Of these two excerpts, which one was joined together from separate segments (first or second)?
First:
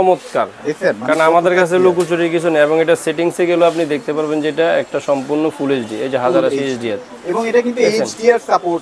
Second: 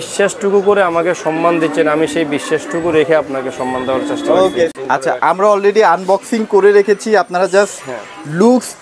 second